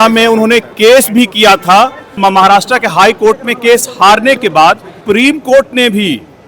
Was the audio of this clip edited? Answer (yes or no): yes